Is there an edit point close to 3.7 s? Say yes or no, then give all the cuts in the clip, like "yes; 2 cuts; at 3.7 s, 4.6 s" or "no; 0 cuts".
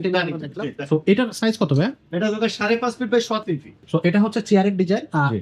yes; 1 cut; at 3.7 s